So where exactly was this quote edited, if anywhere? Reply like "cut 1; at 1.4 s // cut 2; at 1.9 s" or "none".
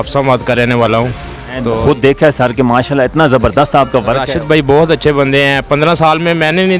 cut 1; at 1.7 s // cut 2; at 4.1 s

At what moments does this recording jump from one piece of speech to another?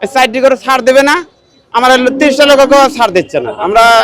none

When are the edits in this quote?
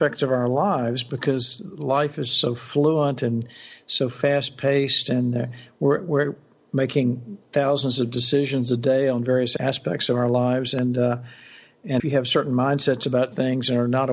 cut 1; at 9.5 s // cut 2; at 12.0 s

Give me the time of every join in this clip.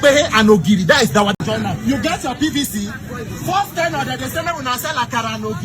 cut 1; at 1.4 s

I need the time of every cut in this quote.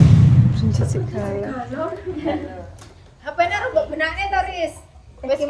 none

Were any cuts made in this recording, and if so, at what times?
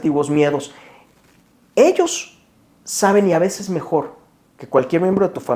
none

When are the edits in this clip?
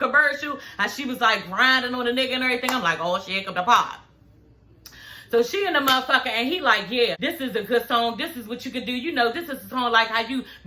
cut 1; at 7.2 s

